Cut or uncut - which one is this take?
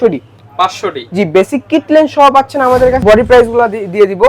cut